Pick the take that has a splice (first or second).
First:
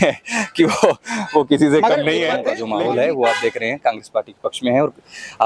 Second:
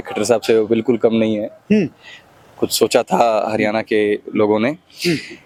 first